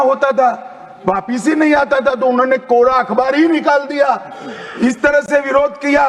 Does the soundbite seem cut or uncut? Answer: uncut